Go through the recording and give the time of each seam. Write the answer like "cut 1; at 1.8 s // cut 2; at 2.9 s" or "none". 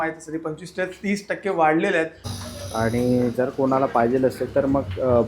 cut 1; at 2.3 s